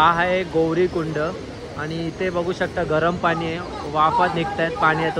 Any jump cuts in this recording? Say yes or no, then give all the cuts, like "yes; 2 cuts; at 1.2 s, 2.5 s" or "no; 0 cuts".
no; 0 cuts